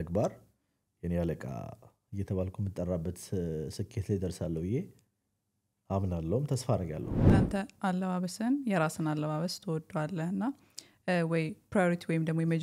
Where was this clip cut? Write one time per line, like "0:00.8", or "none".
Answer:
0:07.3